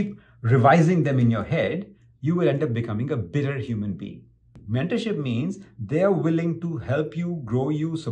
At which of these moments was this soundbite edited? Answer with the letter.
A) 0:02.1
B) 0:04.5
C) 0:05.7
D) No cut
B